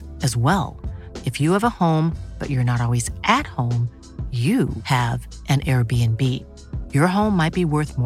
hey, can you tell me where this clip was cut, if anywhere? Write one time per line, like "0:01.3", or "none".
none